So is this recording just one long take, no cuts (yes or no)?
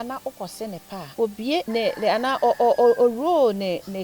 no